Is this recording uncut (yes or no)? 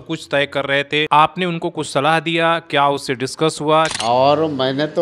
no